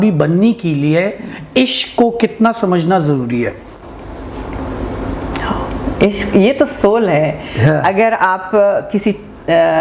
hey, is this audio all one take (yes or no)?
yes